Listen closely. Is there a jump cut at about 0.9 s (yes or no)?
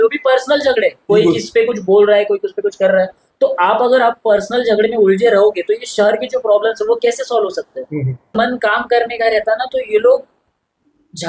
no